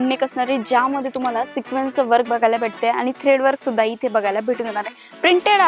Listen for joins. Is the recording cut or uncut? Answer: uncut